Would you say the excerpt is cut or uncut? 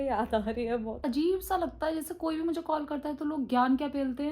cut